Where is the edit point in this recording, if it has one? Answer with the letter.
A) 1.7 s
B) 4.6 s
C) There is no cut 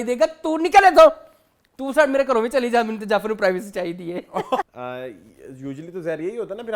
B